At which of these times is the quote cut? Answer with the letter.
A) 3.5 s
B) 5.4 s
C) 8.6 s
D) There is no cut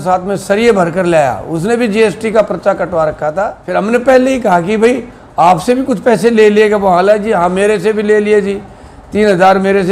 A